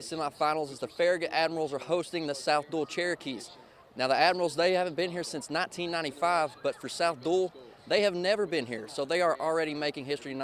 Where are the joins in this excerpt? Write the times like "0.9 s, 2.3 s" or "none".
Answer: none